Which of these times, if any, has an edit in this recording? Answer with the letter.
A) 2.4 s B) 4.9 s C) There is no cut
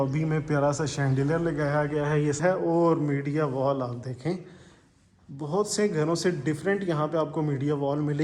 A